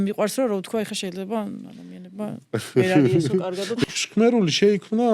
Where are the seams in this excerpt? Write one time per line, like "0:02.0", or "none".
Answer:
0:03.8